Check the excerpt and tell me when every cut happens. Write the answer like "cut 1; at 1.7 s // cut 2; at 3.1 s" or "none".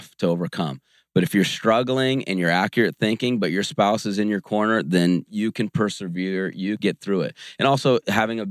cut 1; at 6.8 s

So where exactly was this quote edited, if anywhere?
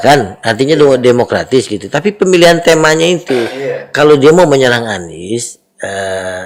none

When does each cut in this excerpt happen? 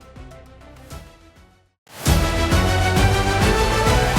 cut 1; at 2.0 s

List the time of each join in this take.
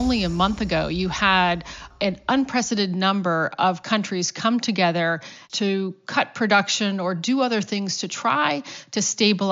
cut 1; at 1.9 s // cut 2; at 5.4 s

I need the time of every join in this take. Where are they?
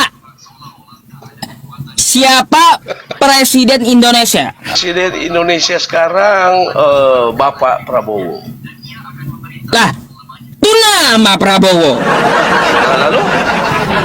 cut 1; at 4.7 s

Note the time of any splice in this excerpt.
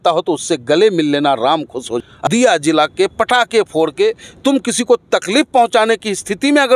cut 1; at 2.0 s

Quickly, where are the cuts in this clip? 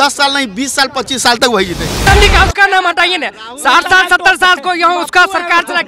cut 1; at 2.1 s

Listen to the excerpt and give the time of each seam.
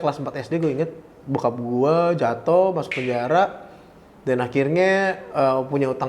none

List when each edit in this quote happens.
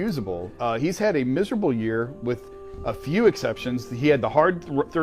none

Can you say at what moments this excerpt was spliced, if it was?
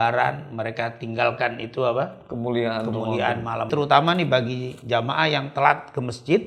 cut 1; at 3.7 s

